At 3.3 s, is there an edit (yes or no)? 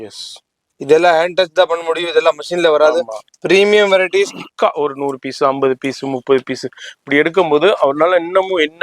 no